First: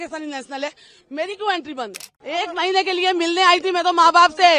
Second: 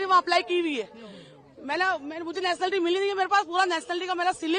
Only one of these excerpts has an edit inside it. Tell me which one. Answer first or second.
first